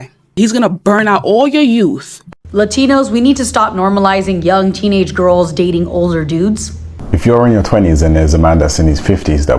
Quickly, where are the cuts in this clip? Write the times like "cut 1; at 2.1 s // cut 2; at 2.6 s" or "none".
cut 1; at 2.1 s // cut 2; at 6.9 s